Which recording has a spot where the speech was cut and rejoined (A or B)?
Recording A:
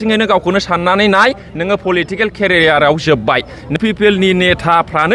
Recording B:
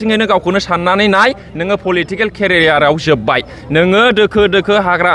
A